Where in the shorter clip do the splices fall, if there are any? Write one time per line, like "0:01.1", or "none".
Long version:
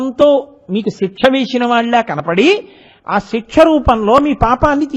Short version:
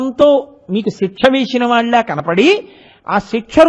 none